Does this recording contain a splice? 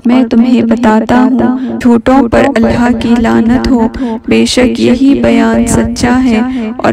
yes; 1 cut; at 1.7 s

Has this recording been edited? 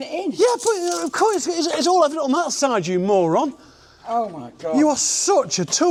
no; 0 cuts

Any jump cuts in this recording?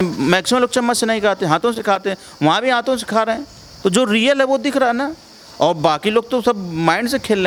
no; 0 cuts

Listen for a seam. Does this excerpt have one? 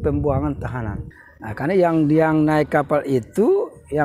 yes; 1 cut; at 1.0 s

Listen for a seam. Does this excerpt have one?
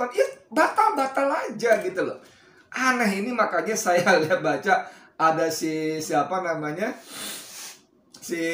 no; 0 cuts

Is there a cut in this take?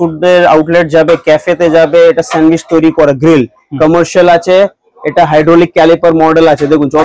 no; 0 cuts

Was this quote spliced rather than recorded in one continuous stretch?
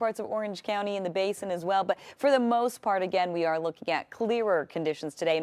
no; 0 cuts

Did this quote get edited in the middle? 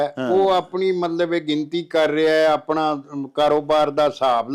no; 0 cuts

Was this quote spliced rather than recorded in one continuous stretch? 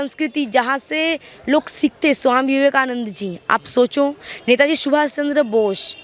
no; 0 cuts

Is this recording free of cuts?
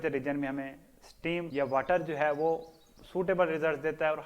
yes; 0 cuts

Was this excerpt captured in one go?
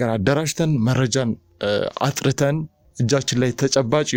yes; 0 cuts

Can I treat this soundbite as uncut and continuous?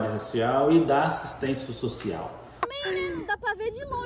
no; 1 cut; at 2.7 s

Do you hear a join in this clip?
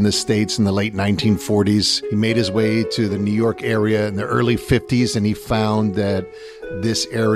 yes; 1 cut; at 2.0 s

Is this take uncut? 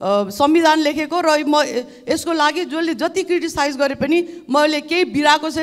yes; 0 cuts

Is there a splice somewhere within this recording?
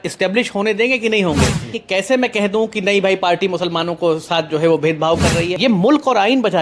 yes; 2 cuts; at 1.8 s, 5.5 s

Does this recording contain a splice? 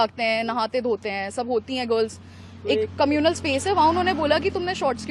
no; 0 cuts

